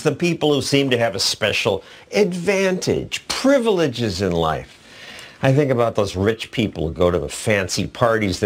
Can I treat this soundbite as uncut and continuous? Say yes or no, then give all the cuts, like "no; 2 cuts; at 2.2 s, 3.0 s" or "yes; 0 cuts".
no; 1 cut; at 1.2 s